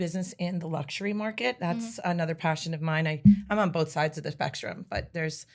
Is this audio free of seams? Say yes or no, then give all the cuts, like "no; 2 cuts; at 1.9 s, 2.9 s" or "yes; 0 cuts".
yes; 0 cuts